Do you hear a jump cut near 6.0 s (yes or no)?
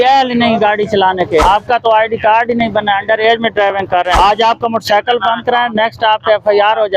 no